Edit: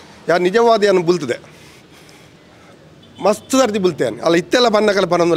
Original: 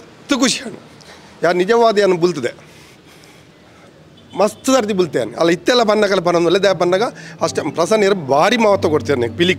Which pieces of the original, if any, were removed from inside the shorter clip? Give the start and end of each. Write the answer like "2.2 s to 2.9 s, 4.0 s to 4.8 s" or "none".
none